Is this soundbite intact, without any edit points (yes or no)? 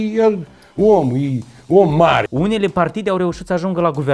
no